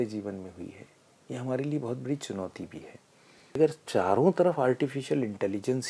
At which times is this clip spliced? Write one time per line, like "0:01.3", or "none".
0:03.6